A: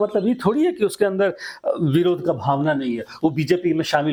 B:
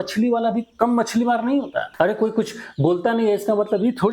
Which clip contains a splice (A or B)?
B